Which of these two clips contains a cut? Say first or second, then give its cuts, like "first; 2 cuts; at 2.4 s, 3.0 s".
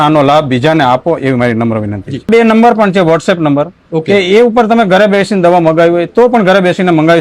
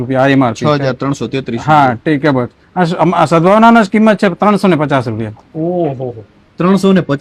first; 1 cut; at 2.3 s